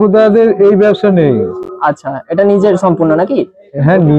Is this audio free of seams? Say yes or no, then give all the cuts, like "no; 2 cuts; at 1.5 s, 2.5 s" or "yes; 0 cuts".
yes; 0 cuts